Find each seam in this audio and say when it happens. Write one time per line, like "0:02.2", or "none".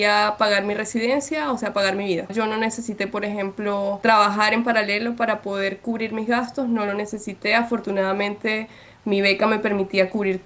0:02.3
0:04.0